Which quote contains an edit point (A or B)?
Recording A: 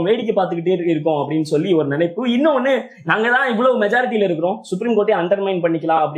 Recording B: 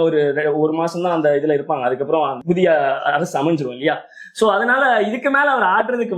B